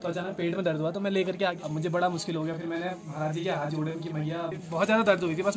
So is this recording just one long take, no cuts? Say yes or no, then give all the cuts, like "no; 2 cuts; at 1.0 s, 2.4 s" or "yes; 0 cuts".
no; 2 cuts; at 1.6 s, 4.6 s